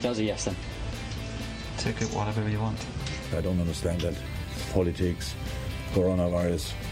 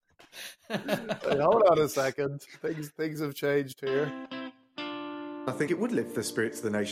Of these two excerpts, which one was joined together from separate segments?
second; 2 cuts; at 2.6 s, 4.2 s

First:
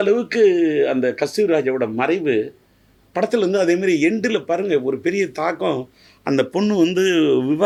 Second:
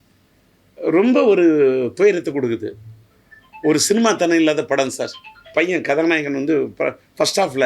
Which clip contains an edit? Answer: second; 1 cut; at 5.5 s

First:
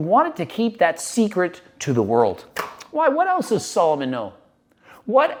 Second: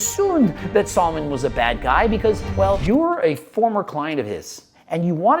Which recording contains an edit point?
second; 1 cut; at 2.8 s

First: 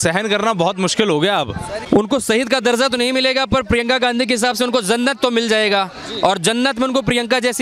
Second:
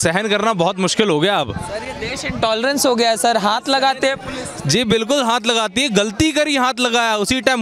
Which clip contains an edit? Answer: first; 1 cut; at 1.8 s

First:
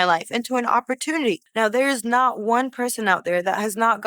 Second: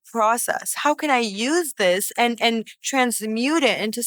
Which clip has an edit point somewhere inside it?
first; 1 cut; at 1.4 s

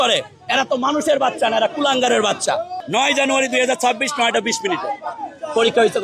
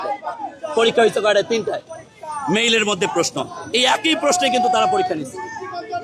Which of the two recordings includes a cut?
first; 1 cut; at 2.7 s

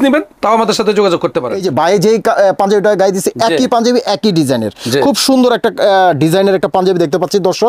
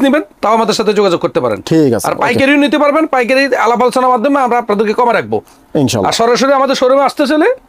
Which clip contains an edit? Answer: first; 1 cut; at 1.6 s

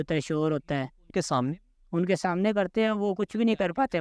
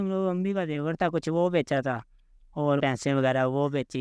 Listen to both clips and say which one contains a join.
second; 1 cut; at 2.8 s

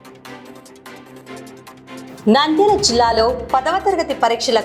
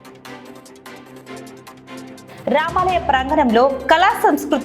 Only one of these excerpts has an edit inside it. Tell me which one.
second; 1 cut; at 2.1 s

